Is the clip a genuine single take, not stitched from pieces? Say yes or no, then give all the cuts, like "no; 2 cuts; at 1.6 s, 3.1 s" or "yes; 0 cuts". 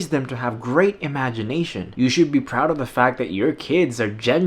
no; 1 cut; at 1.8 s